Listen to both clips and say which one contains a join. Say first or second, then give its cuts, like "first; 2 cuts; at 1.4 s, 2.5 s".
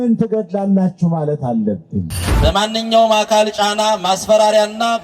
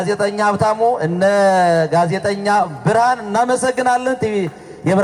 first; 1 cut; at 2.1 s